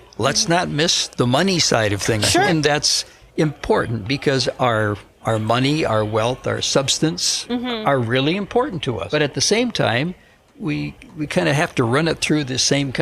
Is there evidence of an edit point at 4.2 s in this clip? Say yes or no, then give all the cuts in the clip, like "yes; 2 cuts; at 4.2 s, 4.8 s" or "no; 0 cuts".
no; 3 cuts; at 1.0 s, 2.5 s, 9.0 s